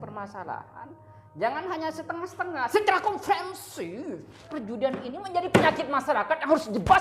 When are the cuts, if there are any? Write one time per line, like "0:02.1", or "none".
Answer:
0:04.5